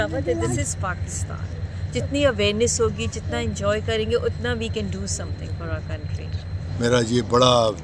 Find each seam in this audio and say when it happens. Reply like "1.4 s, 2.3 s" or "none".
none